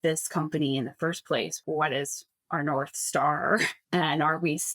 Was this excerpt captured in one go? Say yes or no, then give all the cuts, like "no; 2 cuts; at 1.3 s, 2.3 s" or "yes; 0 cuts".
no; 2 cuts; at 1.6 s, 3.8 s